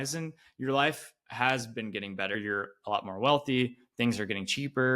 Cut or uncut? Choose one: cut